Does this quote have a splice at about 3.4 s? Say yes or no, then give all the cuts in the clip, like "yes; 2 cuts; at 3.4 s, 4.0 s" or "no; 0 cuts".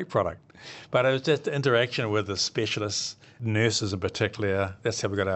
yes; 1 cut; at 3.4 s